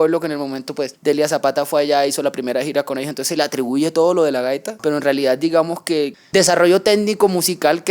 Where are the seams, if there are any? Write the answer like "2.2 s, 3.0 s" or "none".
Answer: 0.9 s, 4.7 s, 6.2 s